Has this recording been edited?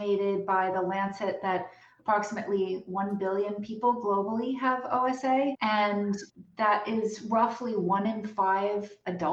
no; 0 cuts

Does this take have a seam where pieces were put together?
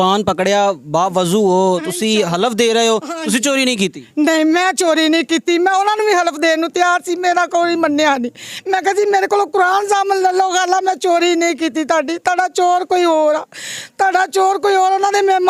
no; 0 cuts

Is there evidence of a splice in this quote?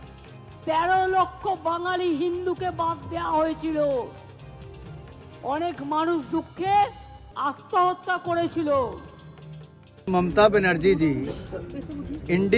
no; 0 cuts

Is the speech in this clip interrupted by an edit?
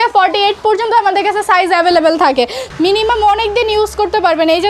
yes; 1 cut; at 2.6 s

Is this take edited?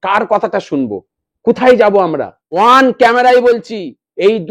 yes; 1 cut; at 2.4 s

